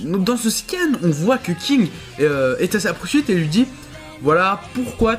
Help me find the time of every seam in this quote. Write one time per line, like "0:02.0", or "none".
0:01.4